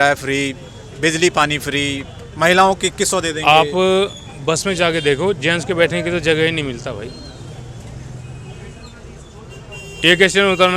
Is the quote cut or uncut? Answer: uncut